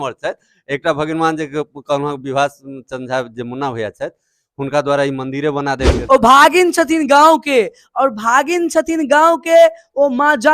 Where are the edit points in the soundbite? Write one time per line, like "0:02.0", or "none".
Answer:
0:06.0